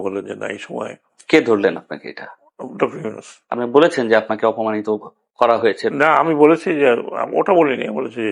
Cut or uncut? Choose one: uncut